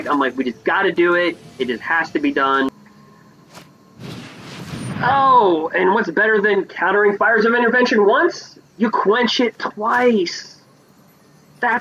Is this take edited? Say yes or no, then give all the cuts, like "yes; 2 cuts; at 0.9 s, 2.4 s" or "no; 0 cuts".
yes; 1 cut; at 2.7 s